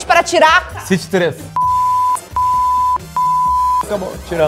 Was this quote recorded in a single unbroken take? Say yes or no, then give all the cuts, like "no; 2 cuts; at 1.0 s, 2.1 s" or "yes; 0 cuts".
yes; 0 cuts